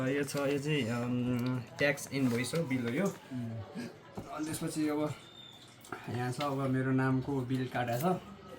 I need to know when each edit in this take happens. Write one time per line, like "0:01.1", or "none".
none